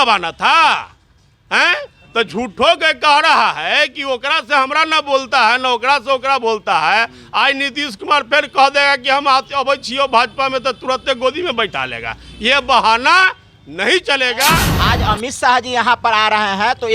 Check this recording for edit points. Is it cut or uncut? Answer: cut